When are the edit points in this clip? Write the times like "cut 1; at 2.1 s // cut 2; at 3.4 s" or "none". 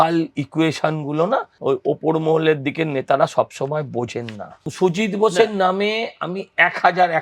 cut 1; at 1.5 s // cut 2; at 4.7 s

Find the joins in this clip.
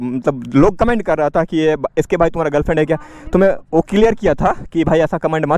none

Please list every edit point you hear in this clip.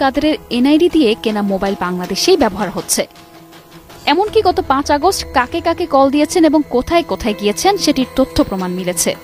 none

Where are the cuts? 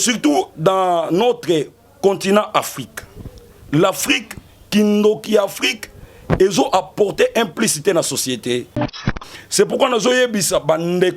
cut 1; at 9.0 s

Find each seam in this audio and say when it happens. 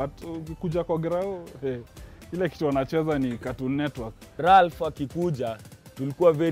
cut 1; at 4.4 s

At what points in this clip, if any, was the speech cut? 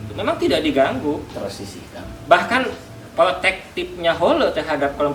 none

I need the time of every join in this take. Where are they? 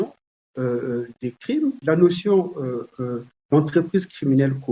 cut 1; at 1.8 s

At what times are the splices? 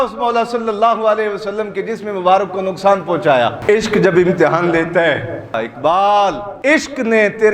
cut 1; at 3.6 s // cut 2; at 5.5 s // cut 3; at 6.5 s

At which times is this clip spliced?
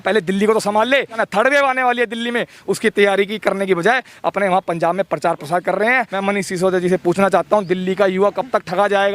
cut 1; at 1.2 s // cut 2; at 6.1 s

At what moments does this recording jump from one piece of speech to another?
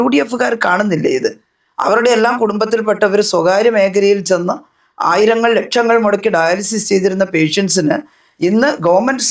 none

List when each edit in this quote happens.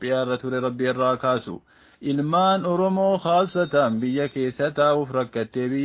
none

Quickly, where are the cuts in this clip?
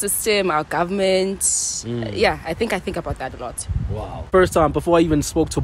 none

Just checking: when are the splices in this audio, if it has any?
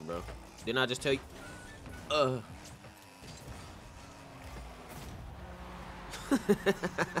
none

